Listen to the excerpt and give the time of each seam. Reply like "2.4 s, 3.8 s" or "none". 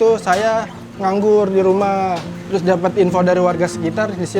2.3 s